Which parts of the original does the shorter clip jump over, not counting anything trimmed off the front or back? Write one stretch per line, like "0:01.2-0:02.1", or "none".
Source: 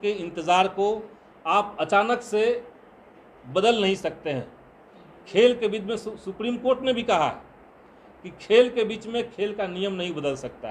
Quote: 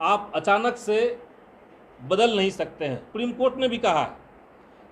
0:04.5-0:06.3